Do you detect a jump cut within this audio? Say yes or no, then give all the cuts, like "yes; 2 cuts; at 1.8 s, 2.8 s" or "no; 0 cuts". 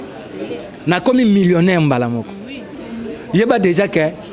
yes; 1 cut; at 2.7 s